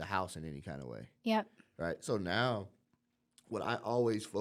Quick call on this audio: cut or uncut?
uncut